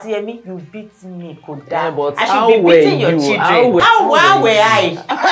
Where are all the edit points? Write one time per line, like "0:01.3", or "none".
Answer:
0:03.8